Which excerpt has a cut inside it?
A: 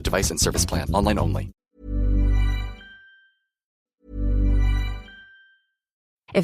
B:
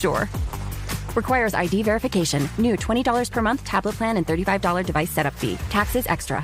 A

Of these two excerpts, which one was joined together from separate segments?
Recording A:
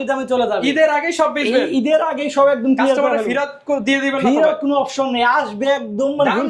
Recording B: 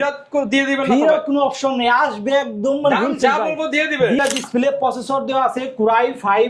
B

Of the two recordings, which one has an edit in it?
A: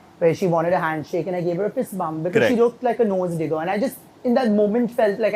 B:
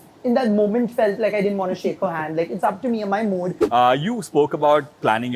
B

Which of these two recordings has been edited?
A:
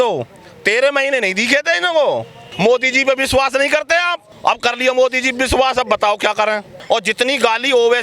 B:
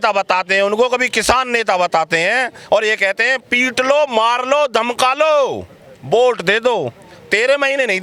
A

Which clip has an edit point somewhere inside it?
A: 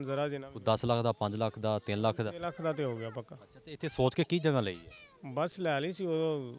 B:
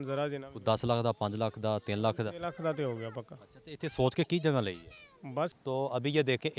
B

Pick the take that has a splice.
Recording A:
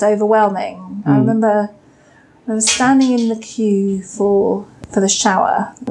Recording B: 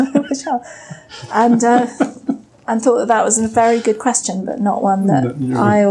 A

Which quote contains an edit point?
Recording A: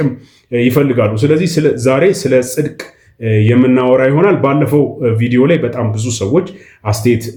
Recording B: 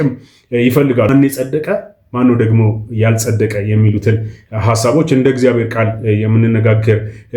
B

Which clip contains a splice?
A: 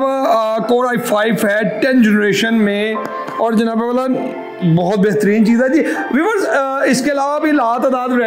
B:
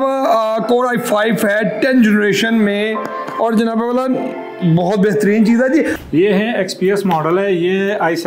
B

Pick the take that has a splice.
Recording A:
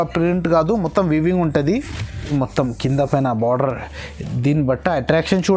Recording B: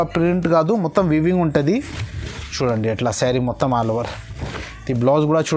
A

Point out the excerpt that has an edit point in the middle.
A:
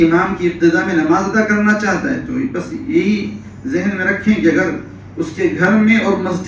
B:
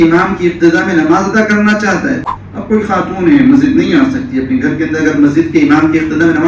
B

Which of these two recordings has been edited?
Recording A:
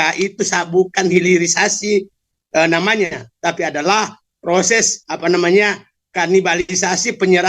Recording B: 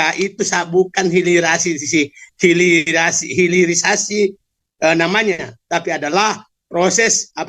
A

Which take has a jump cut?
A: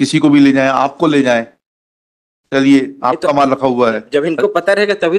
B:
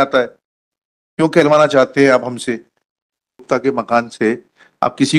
B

